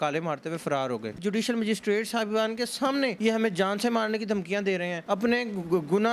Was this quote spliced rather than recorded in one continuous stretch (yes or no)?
yes